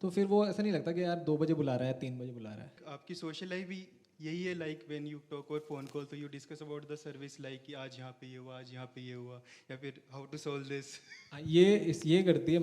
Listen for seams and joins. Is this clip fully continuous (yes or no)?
no